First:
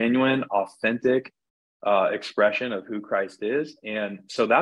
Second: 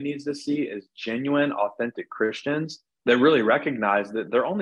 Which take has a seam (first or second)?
second